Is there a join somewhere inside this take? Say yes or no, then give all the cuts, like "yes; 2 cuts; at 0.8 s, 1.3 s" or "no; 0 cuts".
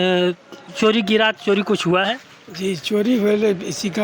no; 0 cuts